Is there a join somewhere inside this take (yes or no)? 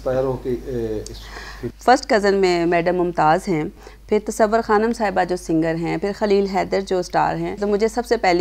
yes